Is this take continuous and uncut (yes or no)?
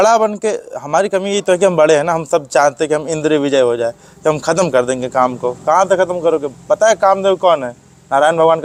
yes